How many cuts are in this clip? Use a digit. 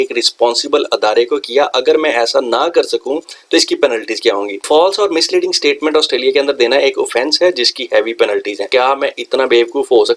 2